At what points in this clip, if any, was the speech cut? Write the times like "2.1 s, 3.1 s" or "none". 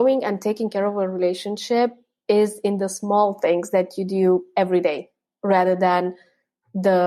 none

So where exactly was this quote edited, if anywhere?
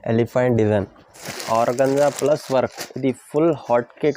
1.3 s

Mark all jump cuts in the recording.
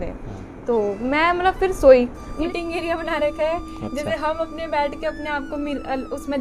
2.4 s

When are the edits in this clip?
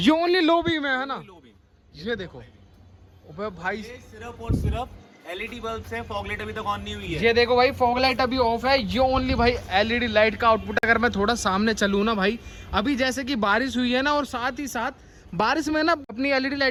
none

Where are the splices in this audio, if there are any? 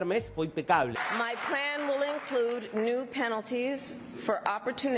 1.0 s

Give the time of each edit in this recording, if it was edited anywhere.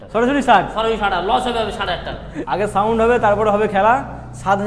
2.3 s

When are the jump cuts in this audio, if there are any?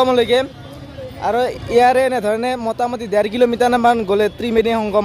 none

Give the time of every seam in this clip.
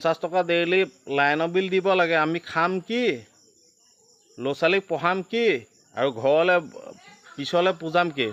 none

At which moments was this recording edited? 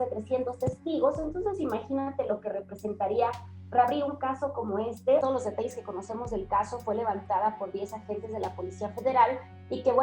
5.2 s

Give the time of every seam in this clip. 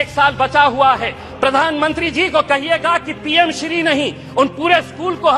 1.2 s

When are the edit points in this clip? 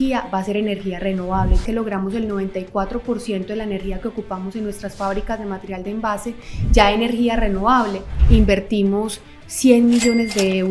1.6 s, 8.1 s

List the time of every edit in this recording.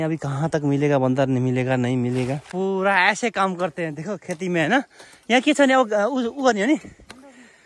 2.5 s

